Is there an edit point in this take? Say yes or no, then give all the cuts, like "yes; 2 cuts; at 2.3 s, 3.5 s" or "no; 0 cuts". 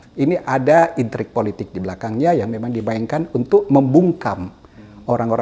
no; 0 cuts